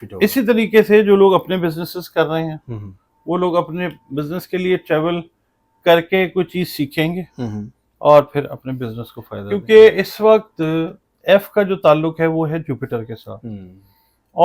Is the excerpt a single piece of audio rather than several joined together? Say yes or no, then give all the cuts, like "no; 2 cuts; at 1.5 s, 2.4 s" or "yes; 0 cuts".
no; 1 cut; at 9.5 s